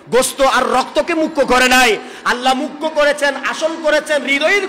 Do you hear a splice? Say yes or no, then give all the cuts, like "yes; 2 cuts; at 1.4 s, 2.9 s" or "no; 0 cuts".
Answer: no; 0 cuts